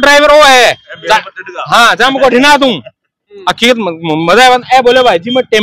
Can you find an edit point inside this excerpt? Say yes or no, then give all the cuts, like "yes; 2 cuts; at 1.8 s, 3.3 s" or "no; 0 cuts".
no; 0 cuts